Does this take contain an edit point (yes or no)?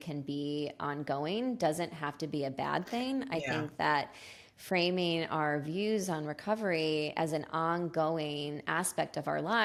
no